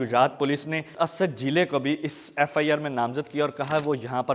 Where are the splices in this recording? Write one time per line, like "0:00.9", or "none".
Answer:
0:00.9